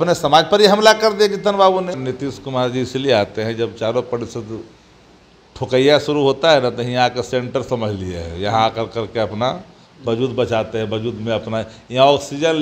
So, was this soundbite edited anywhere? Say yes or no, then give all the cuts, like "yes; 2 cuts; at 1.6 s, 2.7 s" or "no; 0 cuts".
yes; 1 cut; at 2.0 s